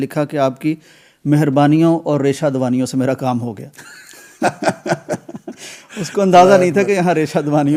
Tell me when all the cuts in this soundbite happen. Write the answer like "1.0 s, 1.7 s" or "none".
none